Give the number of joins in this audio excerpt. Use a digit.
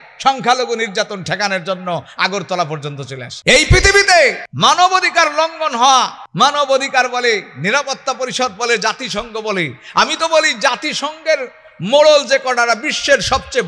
3